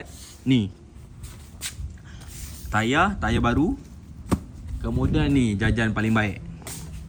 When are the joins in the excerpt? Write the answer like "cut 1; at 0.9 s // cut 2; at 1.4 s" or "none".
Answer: none